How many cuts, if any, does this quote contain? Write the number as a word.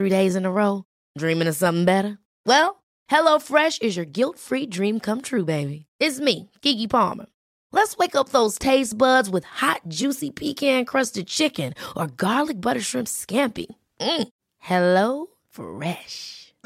zero